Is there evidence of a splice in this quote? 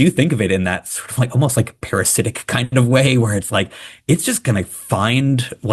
no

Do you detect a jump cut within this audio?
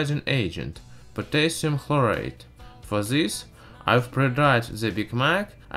yes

